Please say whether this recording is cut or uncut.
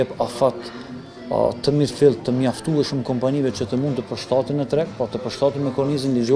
uncut